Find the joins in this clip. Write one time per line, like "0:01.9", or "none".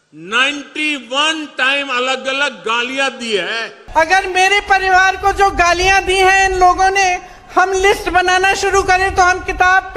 0:03.7